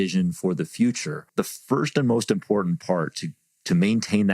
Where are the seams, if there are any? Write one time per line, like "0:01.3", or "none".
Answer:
0:01.3